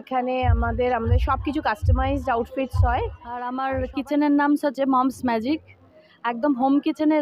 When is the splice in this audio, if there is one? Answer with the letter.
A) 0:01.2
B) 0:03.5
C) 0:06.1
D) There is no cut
B